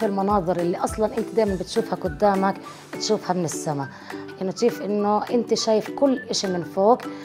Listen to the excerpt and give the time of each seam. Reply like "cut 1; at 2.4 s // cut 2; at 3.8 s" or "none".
cut 1; at 4.2 s